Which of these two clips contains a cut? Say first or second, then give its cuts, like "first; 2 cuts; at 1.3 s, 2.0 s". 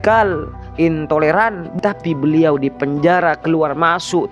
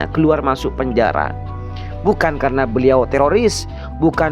first; 1 cut; at 1.7 s